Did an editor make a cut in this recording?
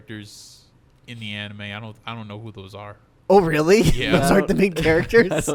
no; 0 cuts

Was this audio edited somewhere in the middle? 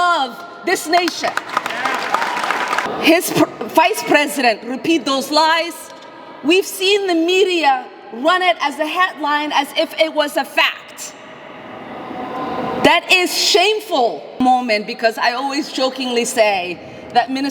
yes; 2 cuts; at 2.9 s, 14.4 s

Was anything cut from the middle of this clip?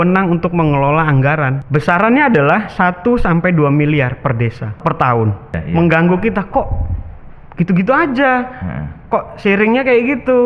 yes; 3 cuts; at 1.6 s, 4.8 s, 5.6 s

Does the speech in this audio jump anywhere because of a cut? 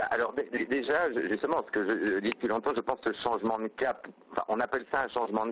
no; 0 cuts

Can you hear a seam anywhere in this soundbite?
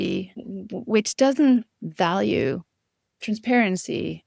no; 0 cuts

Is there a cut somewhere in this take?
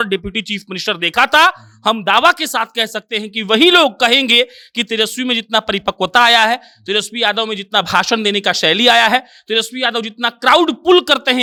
no; 0 cuts

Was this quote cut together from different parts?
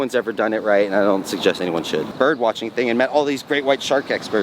yes; 1 cut; at 2.1 s

